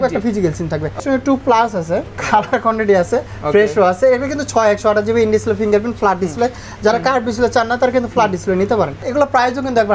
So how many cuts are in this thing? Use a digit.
3